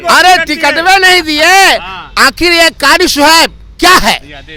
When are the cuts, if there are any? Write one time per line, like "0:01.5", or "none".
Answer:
none